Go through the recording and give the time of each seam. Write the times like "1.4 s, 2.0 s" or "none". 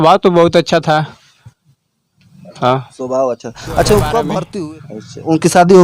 4.5 s